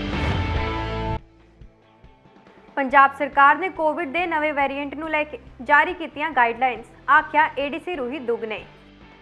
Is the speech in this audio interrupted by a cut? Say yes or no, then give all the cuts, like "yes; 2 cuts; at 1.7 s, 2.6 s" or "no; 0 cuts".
no; 0 cuts